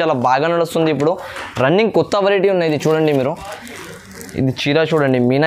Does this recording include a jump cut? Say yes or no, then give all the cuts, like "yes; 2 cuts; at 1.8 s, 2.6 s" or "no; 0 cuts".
no; 0 cuts